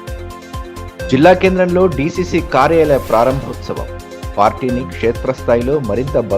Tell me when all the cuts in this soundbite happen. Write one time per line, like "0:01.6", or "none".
0:01.1